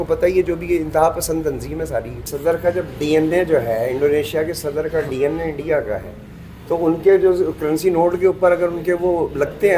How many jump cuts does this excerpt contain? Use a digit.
1